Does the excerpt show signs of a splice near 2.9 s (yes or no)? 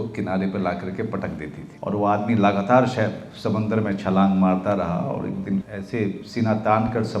no